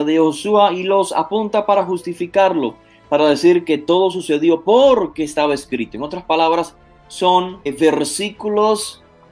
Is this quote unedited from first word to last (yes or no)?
yes